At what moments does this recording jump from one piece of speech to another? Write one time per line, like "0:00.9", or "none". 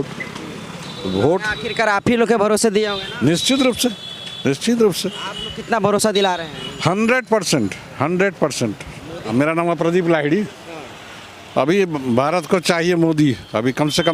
0:09.3